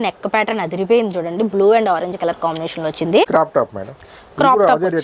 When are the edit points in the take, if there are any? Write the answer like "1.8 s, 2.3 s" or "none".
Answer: 3.2 s